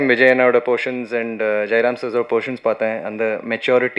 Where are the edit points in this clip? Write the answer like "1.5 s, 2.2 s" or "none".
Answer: none